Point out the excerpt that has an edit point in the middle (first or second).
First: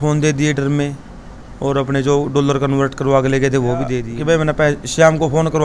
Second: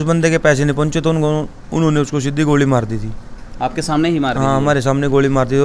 first